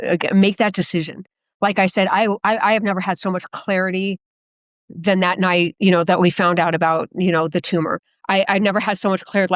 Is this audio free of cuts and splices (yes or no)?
yes